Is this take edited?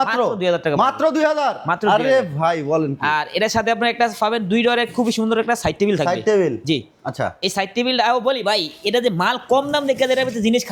no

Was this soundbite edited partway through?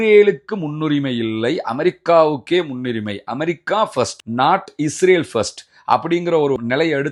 no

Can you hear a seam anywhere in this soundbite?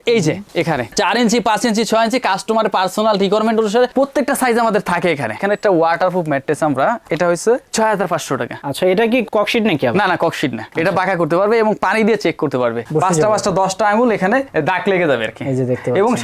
yes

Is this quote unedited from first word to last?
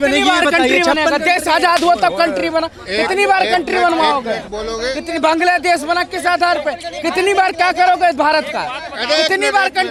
yes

